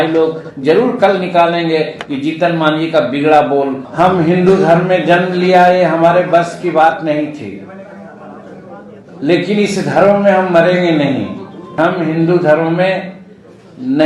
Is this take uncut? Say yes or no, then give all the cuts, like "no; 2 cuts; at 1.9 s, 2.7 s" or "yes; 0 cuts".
no; 2 cuts; at 3.8 s, 11.7 s